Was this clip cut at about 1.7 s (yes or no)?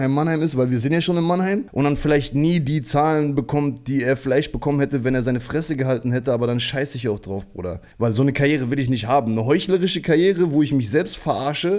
yes